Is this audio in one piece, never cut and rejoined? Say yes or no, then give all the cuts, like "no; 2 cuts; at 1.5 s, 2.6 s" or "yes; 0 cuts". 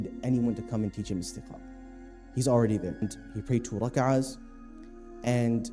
no; 1 cut; at 3.0 s